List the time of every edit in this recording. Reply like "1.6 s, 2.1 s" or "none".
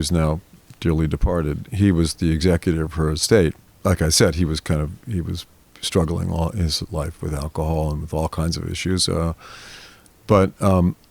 3.7 s